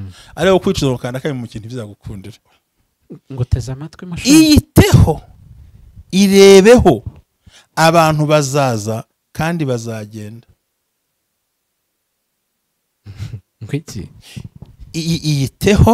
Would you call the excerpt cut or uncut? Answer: cut